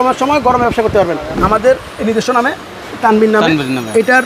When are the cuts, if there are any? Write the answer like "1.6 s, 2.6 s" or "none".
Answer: 1.3 s